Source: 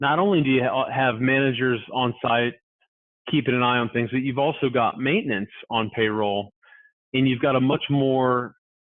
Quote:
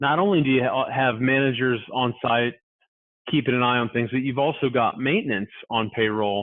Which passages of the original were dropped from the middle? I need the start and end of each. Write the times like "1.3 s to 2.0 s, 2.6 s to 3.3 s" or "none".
none